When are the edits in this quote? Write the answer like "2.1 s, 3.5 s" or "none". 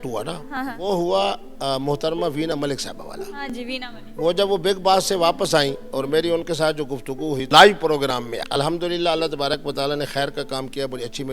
none